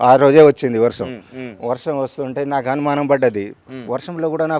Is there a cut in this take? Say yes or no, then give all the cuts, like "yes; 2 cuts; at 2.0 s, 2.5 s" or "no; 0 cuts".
no; 0 cuts